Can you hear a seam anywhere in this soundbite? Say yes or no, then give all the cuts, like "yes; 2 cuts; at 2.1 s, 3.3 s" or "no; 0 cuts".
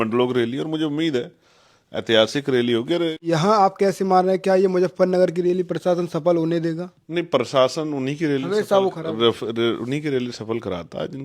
yes; 1 cut; at 3.3 s